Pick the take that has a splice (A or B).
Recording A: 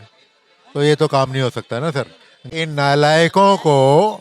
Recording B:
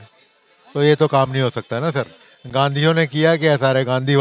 A